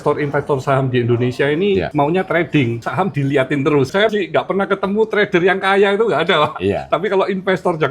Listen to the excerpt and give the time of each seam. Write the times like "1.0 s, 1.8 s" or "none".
1.9 s, 2.8 s, 4.1 s